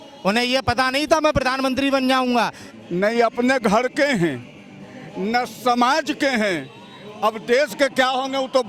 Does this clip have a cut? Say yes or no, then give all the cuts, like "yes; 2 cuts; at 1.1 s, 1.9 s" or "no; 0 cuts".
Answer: yes; 1 cut; at 2.6 s